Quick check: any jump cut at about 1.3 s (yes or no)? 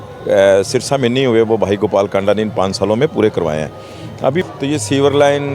no